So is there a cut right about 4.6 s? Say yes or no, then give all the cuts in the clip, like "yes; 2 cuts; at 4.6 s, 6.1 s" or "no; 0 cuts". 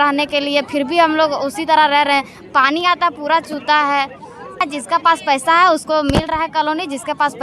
yes; 1 cut; at 4.6 s